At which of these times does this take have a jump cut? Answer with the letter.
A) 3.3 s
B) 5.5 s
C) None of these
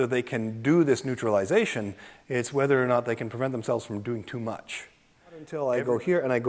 B